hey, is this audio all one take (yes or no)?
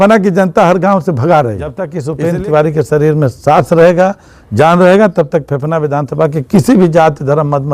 no